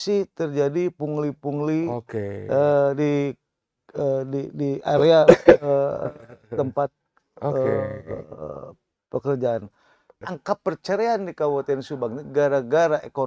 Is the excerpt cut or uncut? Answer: cut